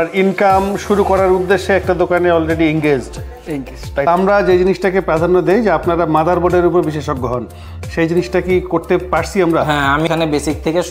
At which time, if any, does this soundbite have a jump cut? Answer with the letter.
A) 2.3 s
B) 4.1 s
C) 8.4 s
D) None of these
B